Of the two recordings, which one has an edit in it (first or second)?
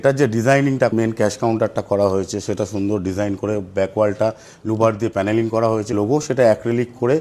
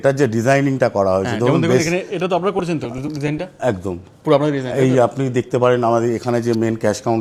first